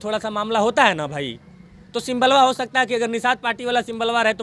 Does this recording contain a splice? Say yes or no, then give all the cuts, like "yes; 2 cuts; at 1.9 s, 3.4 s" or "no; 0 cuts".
no; 0 cuts